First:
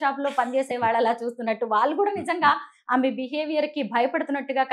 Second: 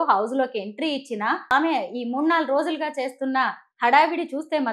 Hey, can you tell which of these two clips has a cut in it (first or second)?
second